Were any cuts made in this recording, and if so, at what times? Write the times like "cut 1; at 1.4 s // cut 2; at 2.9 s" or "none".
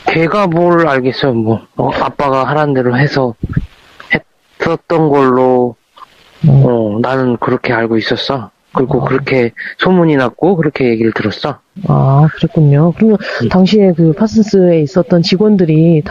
none